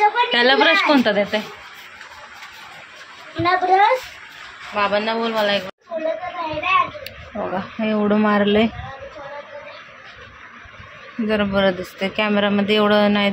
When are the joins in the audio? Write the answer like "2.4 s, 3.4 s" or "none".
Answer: 5.7 s